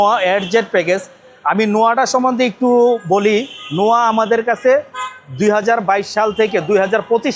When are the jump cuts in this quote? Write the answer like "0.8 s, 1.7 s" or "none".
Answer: none